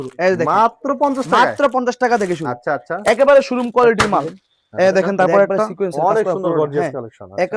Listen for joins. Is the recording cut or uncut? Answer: cut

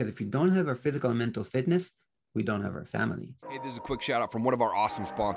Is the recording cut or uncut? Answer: cut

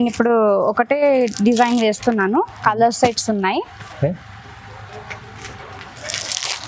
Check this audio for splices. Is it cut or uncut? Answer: uncut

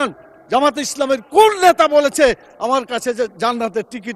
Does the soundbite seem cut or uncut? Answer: uncut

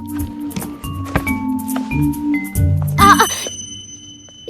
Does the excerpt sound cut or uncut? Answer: uncut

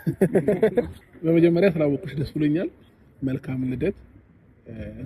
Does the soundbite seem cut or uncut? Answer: cut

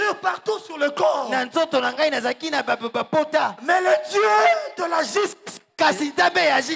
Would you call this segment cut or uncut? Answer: uncut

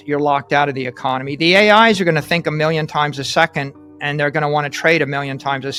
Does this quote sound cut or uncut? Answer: uncut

